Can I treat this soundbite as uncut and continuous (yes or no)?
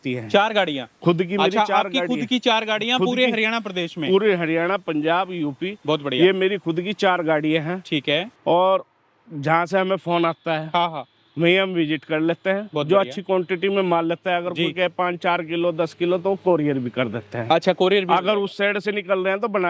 yes